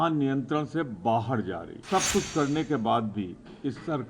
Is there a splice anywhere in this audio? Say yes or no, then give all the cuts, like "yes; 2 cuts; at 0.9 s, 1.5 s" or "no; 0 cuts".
yes; 1 cut; at 1.7 s